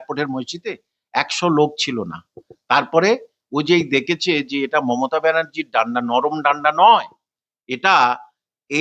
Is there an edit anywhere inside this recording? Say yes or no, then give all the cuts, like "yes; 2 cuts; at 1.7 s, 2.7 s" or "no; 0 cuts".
no; 0 cuts